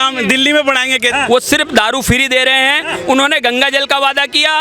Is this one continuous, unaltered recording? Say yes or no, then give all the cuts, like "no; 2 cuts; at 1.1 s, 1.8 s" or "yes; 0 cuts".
no; 1 cut; at 1.1 s